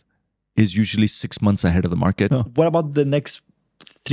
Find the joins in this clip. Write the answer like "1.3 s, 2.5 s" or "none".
2.3 s